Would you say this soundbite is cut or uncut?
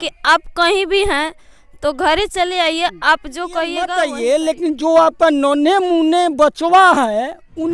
cut